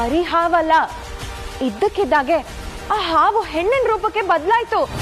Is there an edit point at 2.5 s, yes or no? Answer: no